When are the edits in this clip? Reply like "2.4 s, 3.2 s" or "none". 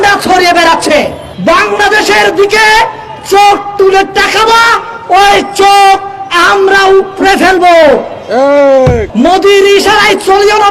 1.2 s, 9.1 s